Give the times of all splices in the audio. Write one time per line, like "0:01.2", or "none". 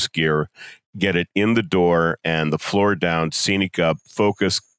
0:02.2